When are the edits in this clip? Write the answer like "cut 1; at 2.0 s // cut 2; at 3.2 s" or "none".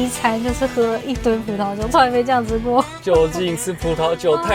cut 1; at 2.9 s